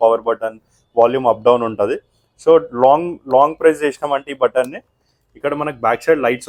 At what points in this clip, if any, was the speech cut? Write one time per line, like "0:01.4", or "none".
none